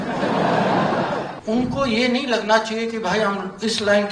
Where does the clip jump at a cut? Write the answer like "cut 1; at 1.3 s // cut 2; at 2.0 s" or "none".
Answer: cut 1; at 1.3 s